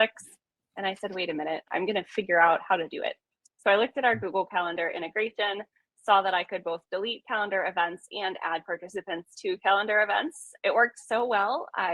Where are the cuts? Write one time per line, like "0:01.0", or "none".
0:01.7
0:10.4